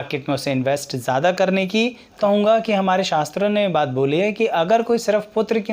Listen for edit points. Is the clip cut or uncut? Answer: cut